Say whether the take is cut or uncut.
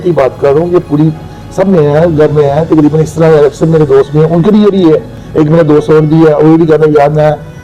uncut